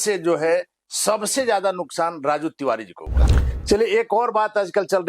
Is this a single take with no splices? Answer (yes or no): no